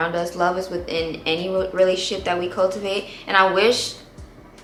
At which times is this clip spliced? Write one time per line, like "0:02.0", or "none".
none